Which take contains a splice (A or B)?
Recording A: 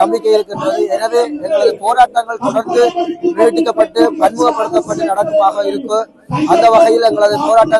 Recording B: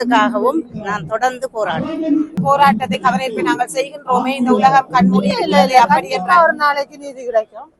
B